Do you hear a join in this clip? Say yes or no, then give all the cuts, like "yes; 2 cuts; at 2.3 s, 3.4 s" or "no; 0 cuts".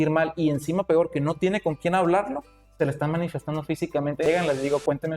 yes; 1 cut; at 4.3 s